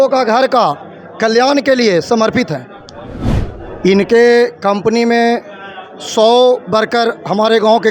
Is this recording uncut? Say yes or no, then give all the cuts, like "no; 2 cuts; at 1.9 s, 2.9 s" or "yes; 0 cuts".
no; 1 cut; at 3.4 s